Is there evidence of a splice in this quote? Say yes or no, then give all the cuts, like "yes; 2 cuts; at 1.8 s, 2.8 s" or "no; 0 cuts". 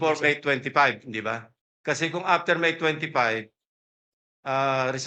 no; 0 cuts